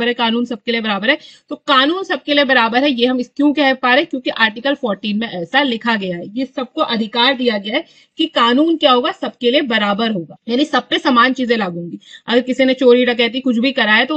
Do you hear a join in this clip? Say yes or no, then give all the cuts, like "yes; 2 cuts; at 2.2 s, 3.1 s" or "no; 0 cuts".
no; 0 cuts